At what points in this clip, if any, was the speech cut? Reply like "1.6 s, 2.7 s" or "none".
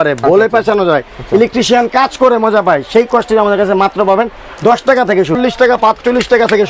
5.4 s